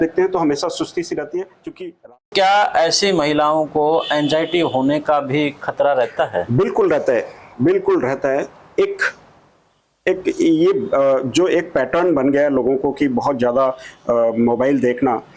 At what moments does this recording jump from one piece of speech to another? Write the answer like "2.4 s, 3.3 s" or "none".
2.3 s